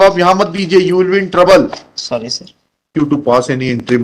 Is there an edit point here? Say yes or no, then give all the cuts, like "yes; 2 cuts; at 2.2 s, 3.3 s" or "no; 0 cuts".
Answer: yes; 1 cut; at 2.9 s